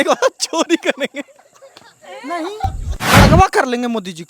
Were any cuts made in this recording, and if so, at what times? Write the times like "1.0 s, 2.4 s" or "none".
3.2 s